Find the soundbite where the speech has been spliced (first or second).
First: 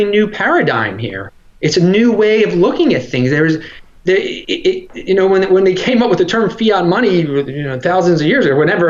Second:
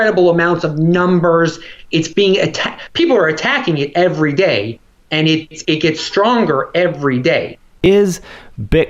second